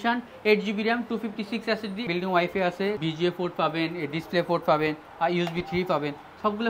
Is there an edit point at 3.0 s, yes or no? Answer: yes